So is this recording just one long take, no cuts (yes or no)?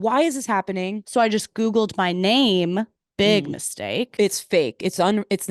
no